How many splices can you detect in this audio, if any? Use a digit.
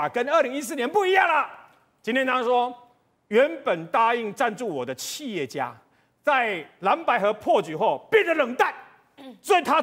0